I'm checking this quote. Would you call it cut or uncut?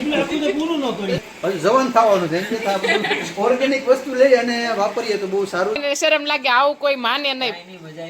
cut